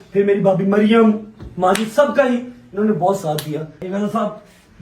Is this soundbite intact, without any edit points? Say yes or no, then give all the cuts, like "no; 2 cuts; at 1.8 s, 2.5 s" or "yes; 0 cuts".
no; 1 cut; at 3.8 s